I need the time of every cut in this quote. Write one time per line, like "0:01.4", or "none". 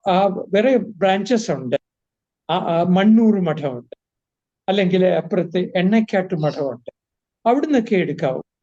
none